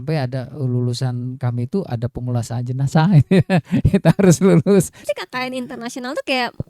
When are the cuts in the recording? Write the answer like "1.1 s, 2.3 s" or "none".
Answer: 5.0 s